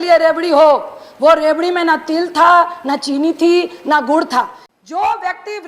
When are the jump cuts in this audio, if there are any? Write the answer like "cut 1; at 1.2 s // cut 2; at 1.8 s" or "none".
cut 1; at 4.6 s